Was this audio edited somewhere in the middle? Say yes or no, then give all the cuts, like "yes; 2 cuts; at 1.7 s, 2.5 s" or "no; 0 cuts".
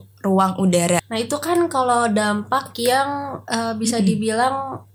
yes; 1 cut; at 1.0 s